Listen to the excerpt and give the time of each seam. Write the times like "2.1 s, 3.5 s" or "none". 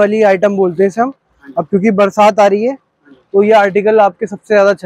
none